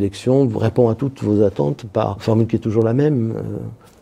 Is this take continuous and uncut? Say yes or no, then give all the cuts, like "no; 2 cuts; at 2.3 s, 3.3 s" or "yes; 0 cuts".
yes; 0 cuts